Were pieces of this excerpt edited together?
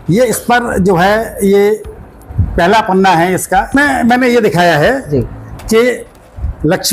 yes; 1 cut; at 3.7 s

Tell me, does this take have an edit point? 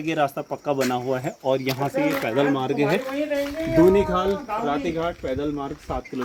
no; 0 cuts

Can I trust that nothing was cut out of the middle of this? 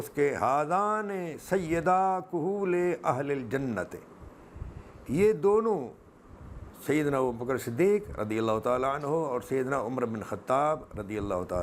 yes; 0 cuts

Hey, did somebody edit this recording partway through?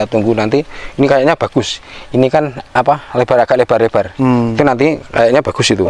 no; 0 cuts

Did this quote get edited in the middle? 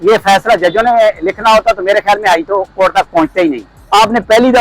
yes; 1 cut; at 3.7 s

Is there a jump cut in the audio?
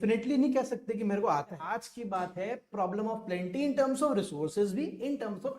yes; 1 cut; at 1.6 s

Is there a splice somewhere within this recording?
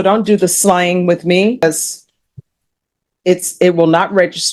yes; 1 cut; at 1.6 s

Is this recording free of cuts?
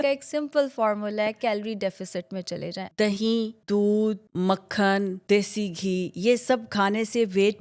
no; 4 cuts; at 2.8 s, 3.6 s, 4.3 s, 5.2 s

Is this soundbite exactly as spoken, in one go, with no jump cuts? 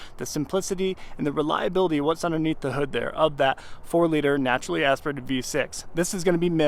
yes; 0 cuts

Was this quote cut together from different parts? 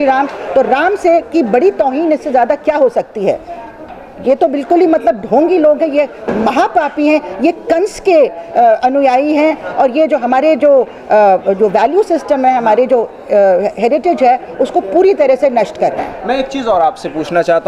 no; 0 cuts

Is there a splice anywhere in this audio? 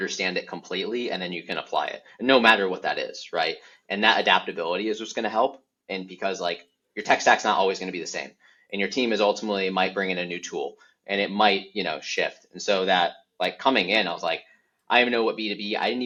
no; 0 cuts

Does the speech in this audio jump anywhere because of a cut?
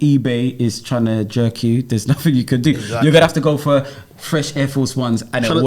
no; 0 cuts

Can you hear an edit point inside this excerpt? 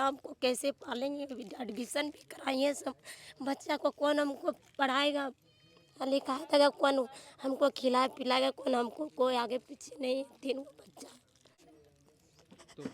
yes; 1 cut; at 11.6 s

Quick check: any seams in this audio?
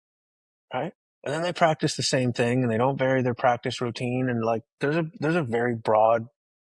yes; 1 cut; at 1.1 s

